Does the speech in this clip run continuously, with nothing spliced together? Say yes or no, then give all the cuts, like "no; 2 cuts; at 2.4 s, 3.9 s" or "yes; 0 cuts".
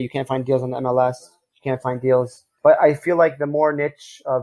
yes; 0 cuts